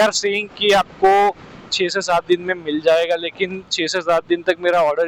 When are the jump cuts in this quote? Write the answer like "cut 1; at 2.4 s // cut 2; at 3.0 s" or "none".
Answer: none